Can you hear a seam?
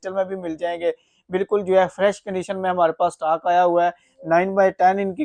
no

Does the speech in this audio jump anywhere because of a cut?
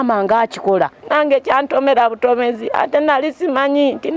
yes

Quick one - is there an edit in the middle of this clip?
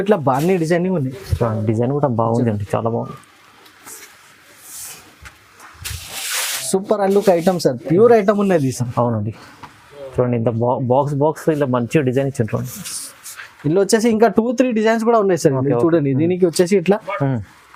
no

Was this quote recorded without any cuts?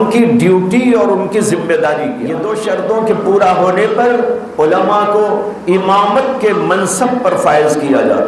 no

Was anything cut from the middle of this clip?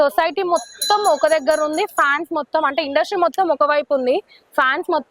no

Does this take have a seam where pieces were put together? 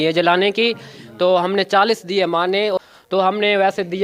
yes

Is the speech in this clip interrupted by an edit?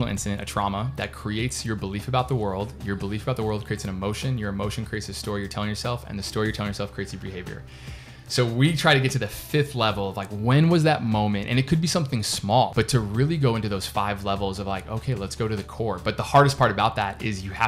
yes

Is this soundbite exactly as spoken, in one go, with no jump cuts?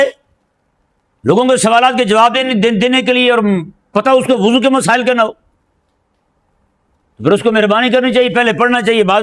yes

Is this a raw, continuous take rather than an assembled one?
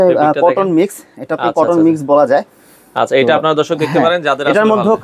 yes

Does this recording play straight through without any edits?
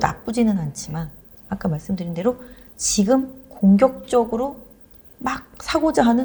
yes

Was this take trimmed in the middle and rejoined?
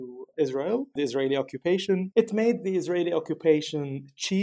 no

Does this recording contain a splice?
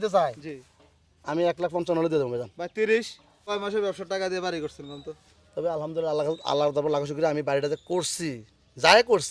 yes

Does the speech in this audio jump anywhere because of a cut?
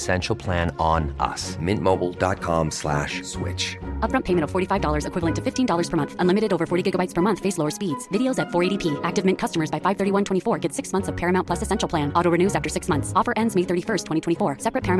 no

